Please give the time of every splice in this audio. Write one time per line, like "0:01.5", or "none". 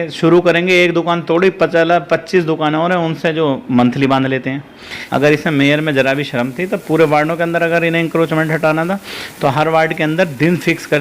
0:04.9